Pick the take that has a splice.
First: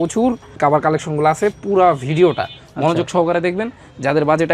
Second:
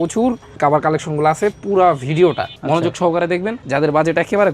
second; 2 cuts; at 2.5 s, 3.6 s

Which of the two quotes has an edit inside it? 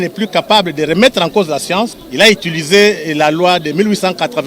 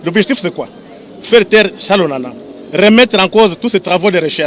first; 1 cut; at 2.0 s

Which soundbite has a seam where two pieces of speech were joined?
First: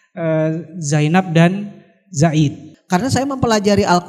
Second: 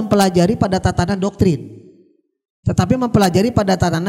first; 1 cut; at 2.7 s

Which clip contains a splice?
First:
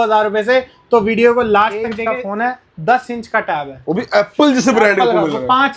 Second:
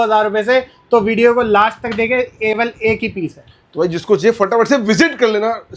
first; 1 cut; at 2.0 s

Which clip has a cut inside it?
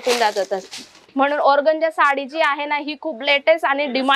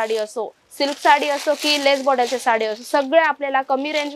first; 1 cut; at 1.0 s

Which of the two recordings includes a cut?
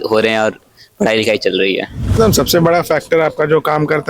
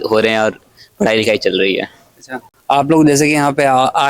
first; 1 cut; at 2.1 s

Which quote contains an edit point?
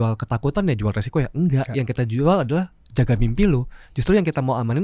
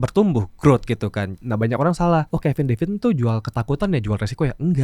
second; 2 cuts; at 1.3 s, 2.3 s

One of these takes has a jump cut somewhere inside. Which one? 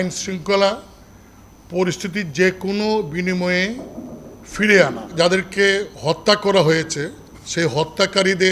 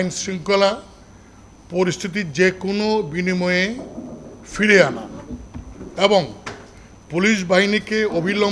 first; 1 cut; at 5.1 s

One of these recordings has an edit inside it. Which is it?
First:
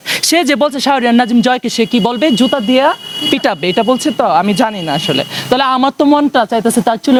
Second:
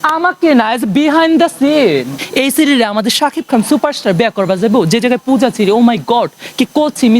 second; 1 cut; at 2.2 s

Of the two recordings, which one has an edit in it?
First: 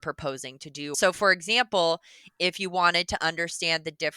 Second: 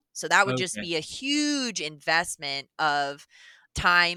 first; 1 cut; at 0.9 s

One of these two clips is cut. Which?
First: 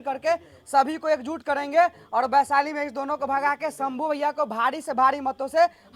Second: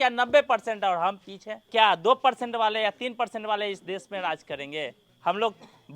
second; 2 cuts; at 1.7 s, 5.0 s

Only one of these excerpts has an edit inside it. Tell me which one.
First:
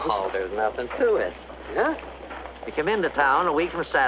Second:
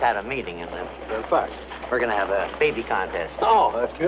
second; 1 cut; at 1.4 s

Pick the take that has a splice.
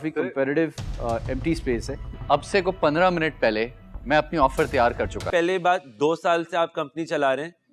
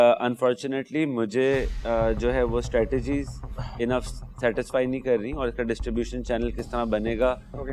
first; 2 cuts; at 2.0 s, 5.2 s

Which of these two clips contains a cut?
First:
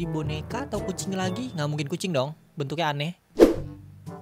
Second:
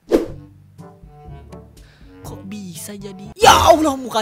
second; 1 cut; at 2.4 s

